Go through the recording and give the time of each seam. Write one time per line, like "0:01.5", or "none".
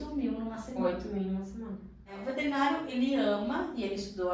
0:02.2